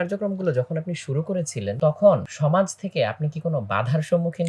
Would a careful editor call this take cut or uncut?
cut